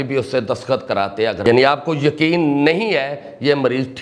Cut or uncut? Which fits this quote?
cut